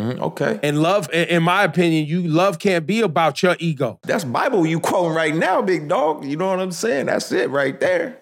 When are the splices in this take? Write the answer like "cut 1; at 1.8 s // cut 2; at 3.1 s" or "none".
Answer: cut 1; at 1.1 s // cut 2; at 4.0 s